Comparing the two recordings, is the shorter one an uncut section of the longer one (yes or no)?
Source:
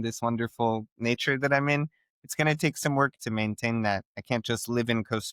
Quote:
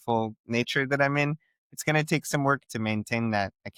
yes